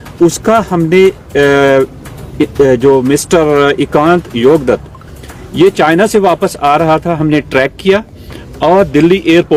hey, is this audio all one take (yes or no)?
yes